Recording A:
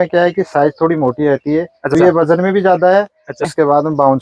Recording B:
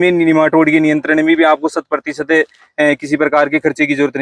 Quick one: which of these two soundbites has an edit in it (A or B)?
A